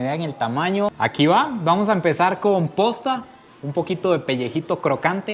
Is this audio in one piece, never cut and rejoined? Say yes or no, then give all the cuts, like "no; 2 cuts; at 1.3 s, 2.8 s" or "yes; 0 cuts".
no; 1 cut; at 1.0 s